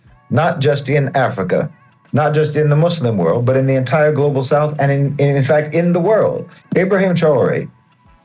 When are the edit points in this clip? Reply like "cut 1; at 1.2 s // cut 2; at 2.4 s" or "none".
cut 1; at 6.5 s